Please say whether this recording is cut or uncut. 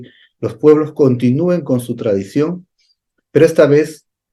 uncut